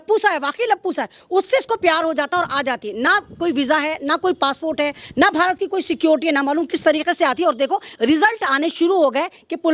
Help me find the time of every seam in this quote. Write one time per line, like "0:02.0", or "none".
none